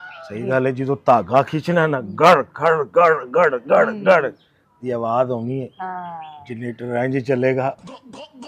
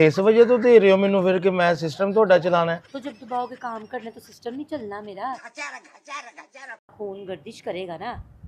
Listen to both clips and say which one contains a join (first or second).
second